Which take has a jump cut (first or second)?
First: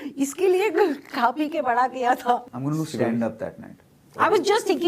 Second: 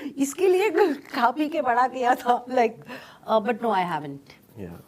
first